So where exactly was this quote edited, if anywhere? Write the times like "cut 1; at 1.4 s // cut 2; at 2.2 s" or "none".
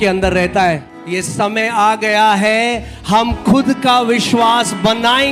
cut 1; at 0.9 s